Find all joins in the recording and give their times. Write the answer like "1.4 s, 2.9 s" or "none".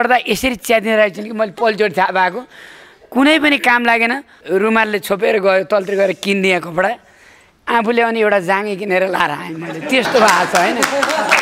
none